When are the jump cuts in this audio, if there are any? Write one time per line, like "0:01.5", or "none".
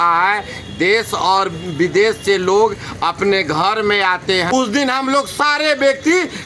0:04.5